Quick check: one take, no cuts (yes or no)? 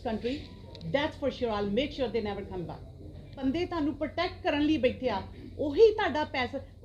no